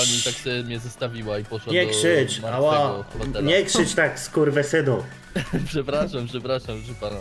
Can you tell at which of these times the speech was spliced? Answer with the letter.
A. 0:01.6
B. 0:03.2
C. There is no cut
B